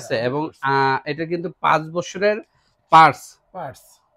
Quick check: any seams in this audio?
no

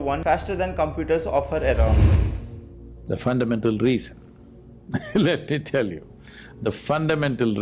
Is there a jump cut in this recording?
yes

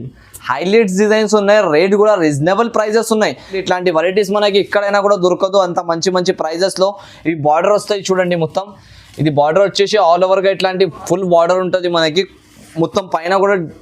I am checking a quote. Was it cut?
yes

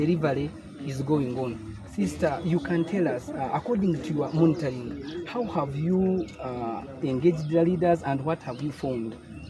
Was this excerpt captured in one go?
yes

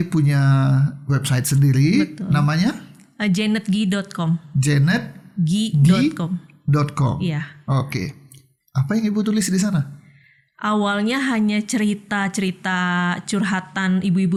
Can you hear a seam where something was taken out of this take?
no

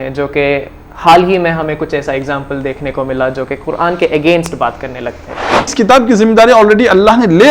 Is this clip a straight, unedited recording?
no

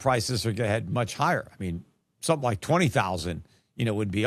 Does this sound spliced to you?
no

